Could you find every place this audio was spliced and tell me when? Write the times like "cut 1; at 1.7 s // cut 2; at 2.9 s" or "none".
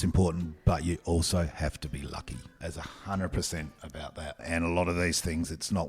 cut 1; at 4.4 s